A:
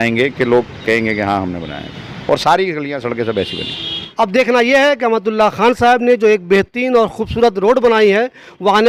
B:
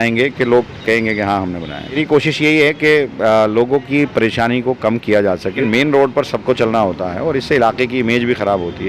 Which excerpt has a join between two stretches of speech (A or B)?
B